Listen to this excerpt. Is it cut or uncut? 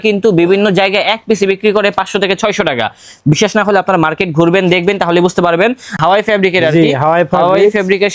cut